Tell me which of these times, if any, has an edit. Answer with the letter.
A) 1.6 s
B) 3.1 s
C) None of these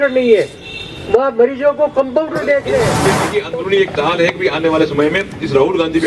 B